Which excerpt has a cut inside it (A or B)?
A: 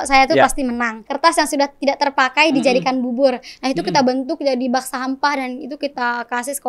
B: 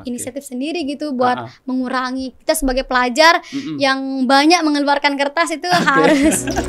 A